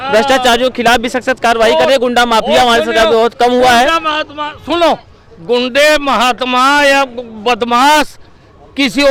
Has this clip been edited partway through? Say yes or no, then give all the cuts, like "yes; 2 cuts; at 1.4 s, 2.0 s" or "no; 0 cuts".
no; 0 cuts